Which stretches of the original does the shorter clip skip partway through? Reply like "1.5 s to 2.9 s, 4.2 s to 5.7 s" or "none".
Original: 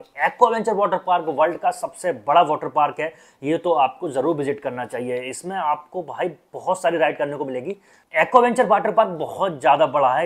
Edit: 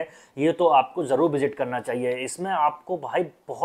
none